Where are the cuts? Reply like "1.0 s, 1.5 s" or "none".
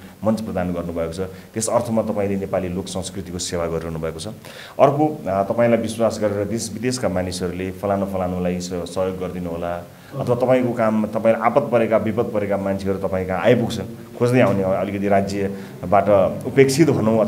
none